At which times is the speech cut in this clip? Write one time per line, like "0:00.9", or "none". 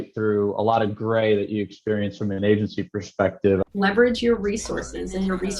0:03.6